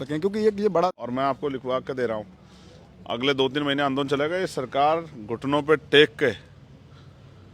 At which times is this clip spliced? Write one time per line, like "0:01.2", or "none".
0:00.9